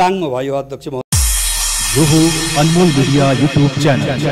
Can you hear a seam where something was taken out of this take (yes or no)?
yes